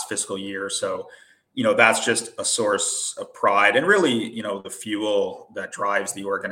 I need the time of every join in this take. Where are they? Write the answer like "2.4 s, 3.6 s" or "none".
none